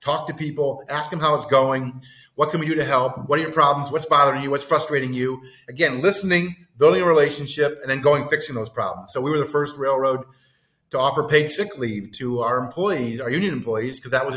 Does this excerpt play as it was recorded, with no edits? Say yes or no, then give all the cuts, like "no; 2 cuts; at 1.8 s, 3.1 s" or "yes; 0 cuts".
yes; 0 cuts